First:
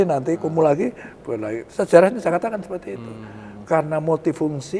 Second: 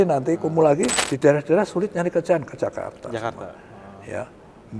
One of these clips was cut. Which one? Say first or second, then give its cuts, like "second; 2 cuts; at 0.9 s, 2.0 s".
second; 1 cut; at 1.0 s